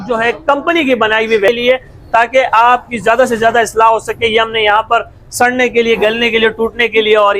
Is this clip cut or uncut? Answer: cut